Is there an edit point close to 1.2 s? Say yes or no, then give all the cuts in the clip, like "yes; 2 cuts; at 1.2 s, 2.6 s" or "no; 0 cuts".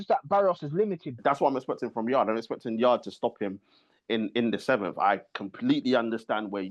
yes; 1 cut; at 1.2 s